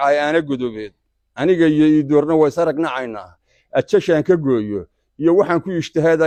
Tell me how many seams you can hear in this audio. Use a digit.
0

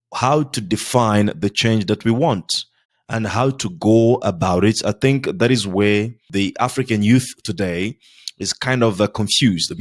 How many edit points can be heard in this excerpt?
1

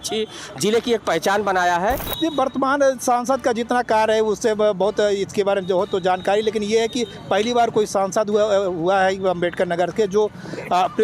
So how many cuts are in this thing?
1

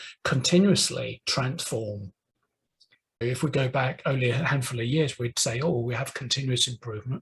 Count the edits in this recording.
1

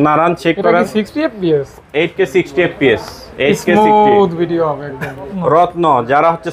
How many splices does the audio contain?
2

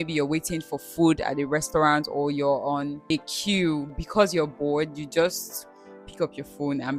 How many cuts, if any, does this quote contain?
2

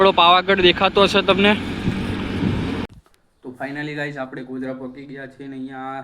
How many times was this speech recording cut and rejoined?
1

